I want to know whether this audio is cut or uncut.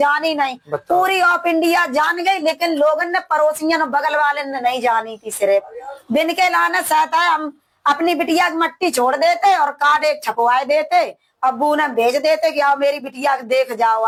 uncut